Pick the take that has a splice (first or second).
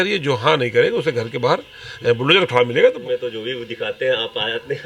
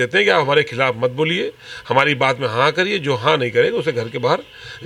first